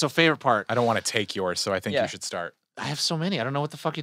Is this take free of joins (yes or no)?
no